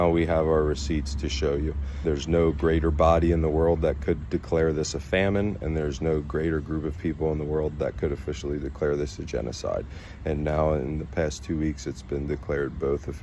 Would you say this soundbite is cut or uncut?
cut